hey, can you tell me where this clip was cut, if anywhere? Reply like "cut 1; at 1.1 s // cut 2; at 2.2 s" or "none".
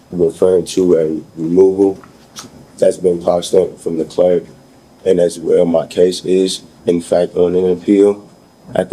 none